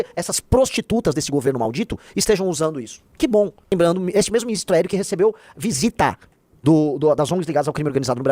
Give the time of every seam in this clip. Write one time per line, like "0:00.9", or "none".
0:03.7